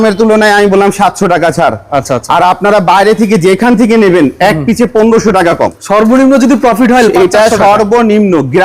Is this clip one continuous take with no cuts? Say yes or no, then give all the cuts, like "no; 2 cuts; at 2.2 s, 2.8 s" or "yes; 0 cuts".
no; 1 cut; at 5.8 s